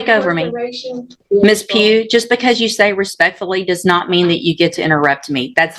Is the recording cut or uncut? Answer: cut